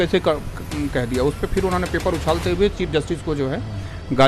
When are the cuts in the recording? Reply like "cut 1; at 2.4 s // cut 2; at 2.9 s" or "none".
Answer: none